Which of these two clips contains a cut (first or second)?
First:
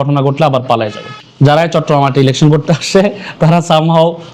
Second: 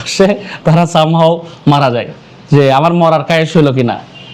first